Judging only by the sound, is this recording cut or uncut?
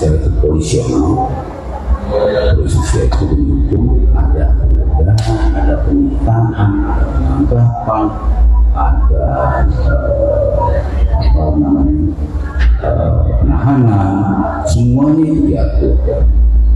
uncut